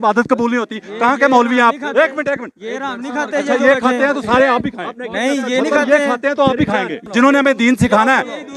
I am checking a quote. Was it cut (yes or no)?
yes